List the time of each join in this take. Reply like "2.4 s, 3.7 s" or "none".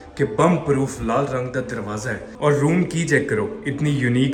none

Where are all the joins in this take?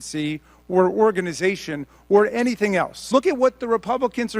3.0 s

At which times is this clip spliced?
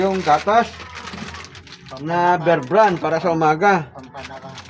none

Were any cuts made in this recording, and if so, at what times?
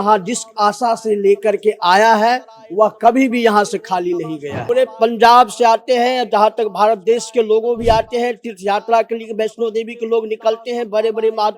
4.5 s

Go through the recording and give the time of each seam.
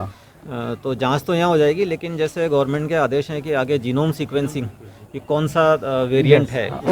none

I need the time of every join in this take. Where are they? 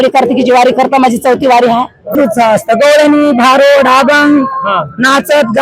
2.2 s

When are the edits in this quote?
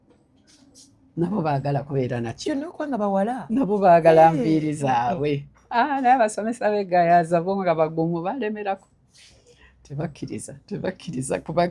none

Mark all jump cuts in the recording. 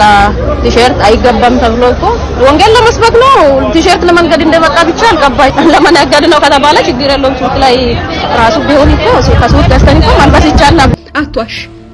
5.5 s, 10.9 s

